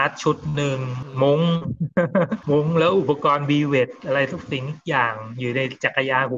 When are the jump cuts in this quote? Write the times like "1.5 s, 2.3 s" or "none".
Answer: none